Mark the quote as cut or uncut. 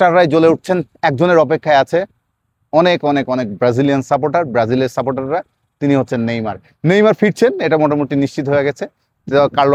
uncut